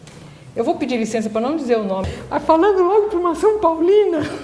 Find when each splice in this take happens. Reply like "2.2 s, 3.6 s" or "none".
2.1 s